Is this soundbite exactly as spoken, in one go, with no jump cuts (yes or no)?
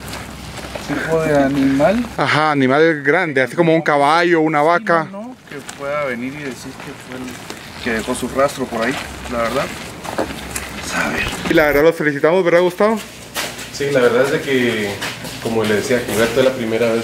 yes